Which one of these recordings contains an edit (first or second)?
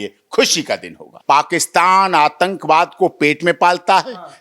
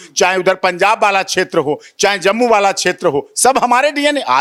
first